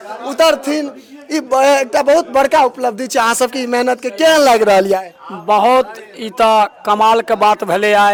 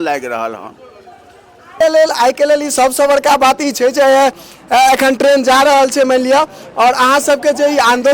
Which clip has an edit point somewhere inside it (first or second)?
second